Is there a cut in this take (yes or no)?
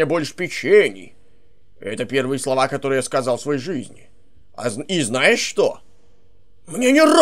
no